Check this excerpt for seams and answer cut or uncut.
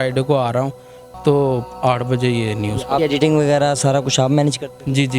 cut